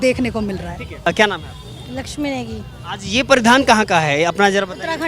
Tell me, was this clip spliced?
no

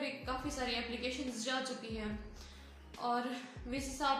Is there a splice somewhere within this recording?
no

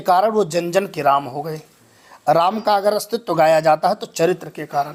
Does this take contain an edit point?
no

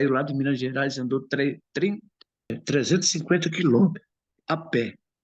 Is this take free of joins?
no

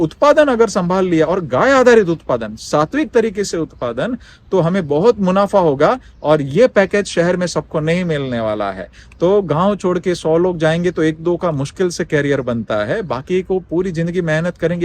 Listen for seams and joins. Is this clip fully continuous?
yes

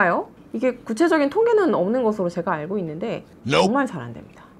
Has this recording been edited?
no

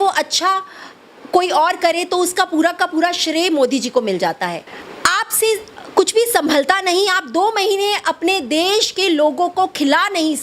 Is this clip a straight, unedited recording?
no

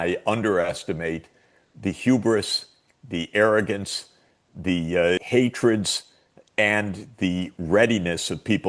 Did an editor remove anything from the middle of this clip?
yes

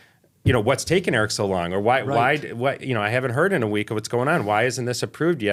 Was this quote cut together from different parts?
no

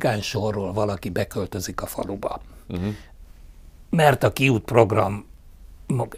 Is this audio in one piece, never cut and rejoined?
yes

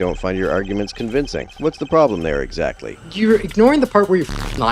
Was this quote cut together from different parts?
yes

